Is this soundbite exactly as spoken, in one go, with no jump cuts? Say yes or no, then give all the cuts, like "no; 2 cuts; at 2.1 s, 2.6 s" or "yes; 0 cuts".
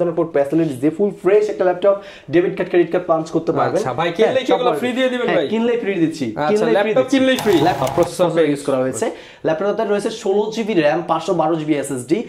no; 1 cut; at 7.8 s